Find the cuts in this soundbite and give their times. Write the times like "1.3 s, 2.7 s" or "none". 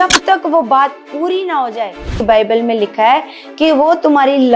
2.1 s